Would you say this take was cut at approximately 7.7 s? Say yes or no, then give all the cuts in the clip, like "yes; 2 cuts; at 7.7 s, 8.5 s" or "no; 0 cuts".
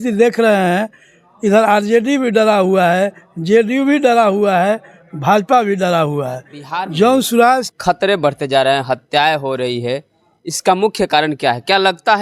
yes; 1 cut; at 7.7 s